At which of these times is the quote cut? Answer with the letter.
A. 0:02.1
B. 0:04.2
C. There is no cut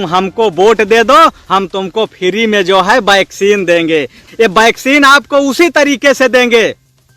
B